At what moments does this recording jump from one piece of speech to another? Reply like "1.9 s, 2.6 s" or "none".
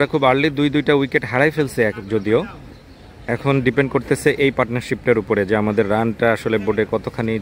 none